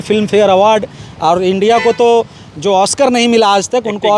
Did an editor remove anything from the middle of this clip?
no; 0 cuts

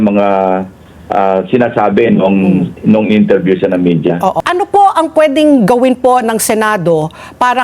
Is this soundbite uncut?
no; 1 cut; at 4.4 s

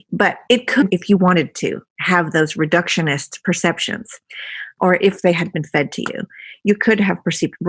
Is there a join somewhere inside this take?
yes; 1 cut; at 4.8 s

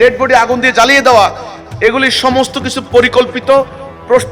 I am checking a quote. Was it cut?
no; 0 cuts

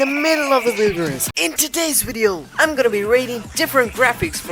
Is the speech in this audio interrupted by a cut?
yes; 1 cut; at 1.4 s

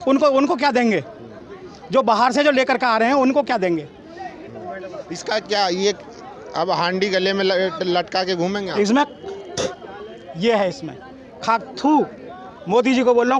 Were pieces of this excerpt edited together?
no; 0 cuts

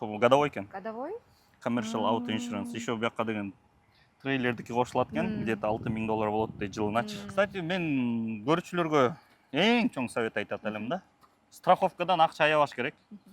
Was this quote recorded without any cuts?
no; 1 cut; at 7.3 s

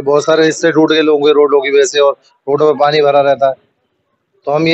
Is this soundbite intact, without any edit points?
yes; 0 cuts

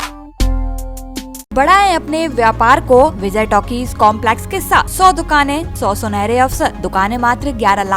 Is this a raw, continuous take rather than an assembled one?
no; 5 cuts; at 1.5 s, 3.2 s, 4.9 s, 5.7 s, 6.8 s

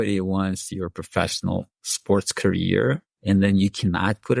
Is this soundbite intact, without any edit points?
no; 1 cut; at 3.1 s

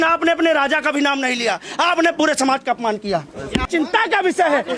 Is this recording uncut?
no; 1 cut; at 3.7 s

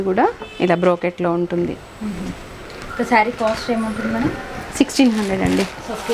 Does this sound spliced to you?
no; 0 cuts

